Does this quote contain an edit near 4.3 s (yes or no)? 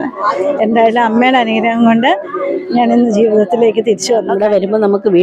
yes